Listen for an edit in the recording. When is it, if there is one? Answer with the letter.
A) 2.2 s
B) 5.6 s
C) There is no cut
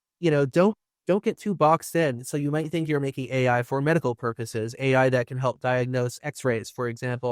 A